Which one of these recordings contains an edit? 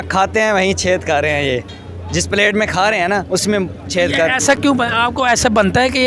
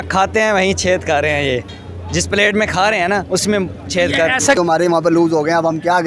second; 1 cut; at 4.6 s

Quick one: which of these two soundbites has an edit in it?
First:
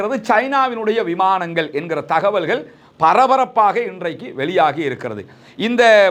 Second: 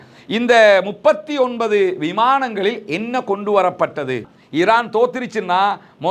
second; 1 cut; at 4.4 s

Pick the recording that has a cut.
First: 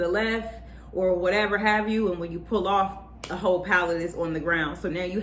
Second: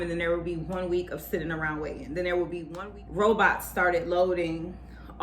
second; 1 cut; at 2.7 s

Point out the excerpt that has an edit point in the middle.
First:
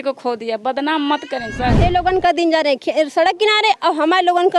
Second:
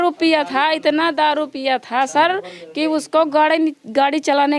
first; 1 cut; at 1.8 s

